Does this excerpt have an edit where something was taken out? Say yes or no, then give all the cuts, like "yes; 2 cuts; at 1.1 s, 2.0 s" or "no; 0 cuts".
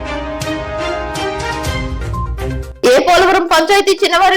yes; 1 cut; at 2.7 s